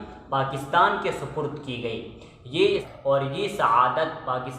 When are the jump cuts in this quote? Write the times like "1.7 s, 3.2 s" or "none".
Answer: 2.8 s